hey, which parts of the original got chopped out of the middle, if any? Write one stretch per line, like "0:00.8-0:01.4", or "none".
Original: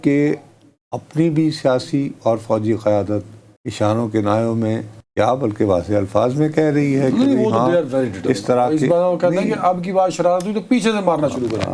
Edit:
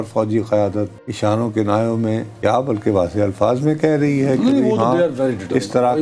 0:03.4-0:03.6
0:04.9-0:05.0